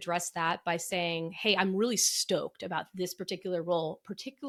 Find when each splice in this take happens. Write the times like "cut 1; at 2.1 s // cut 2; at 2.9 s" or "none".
none